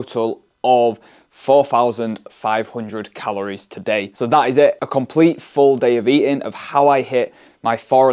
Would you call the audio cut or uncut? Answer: uncut